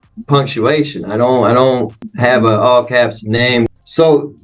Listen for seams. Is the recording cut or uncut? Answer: cut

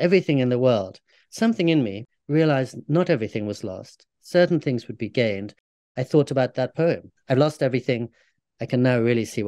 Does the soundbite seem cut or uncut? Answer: cut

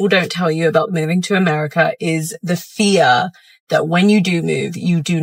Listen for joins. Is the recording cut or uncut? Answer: uncut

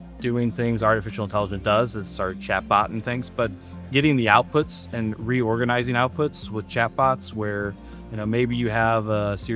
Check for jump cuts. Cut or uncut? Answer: uncut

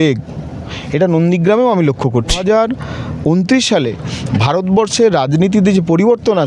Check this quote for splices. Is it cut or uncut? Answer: cut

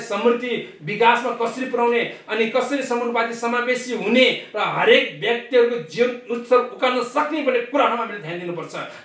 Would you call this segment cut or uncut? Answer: uncut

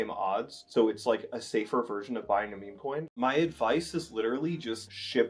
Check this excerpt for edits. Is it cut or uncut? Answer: cut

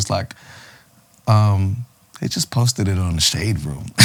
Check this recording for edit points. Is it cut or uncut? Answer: uncut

